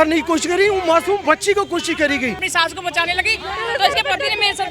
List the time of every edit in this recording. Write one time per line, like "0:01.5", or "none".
0:02.4